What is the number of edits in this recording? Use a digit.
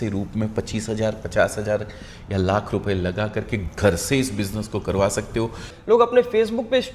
1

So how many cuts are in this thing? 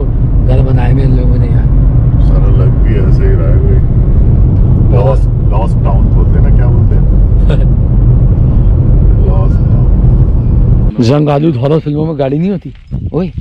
1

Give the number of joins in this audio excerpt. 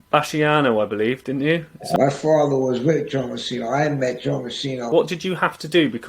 2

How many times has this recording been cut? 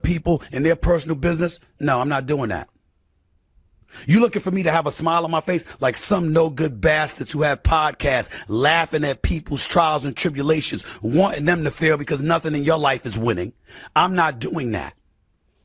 0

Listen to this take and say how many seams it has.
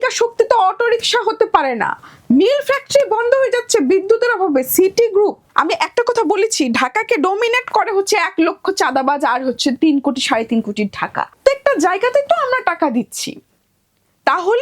2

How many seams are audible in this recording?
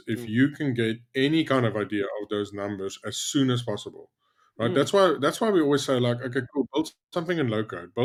0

